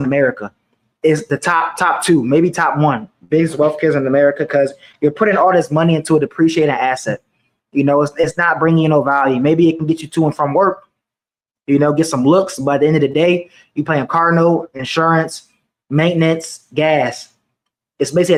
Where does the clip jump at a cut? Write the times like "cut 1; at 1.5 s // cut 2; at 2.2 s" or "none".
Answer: none